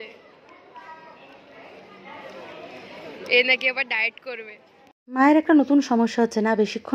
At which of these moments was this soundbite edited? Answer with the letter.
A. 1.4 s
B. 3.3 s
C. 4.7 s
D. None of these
D